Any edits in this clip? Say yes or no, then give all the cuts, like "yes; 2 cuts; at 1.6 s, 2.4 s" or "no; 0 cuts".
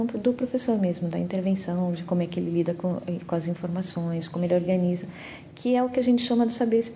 no; 0 cuts